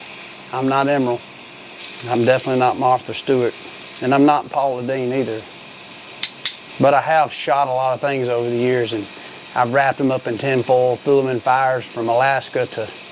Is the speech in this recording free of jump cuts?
yes; 0 cuts

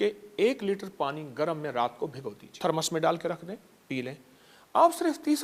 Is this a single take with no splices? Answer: no; 1 cut; at 2.5 s

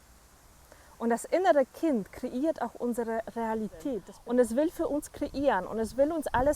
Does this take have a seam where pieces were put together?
yes; 1 cut; at 4.1 s

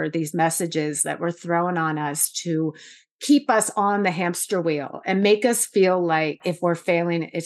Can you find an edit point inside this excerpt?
yes; 1 cut; at 6.5 s

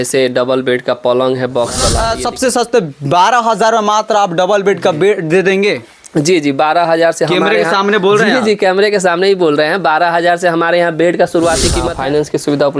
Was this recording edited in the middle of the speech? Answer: yes; 2 cuts; at 2.0 s, 11.8 s

